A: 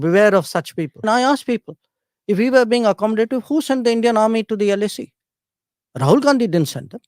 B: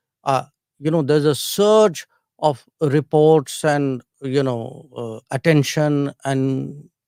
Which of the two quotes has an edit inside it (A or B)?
A